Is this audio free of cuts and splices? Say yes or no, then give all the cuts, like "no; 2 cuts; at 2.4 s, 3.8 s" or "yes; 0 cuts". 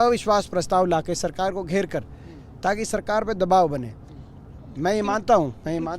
yes; 0 cuts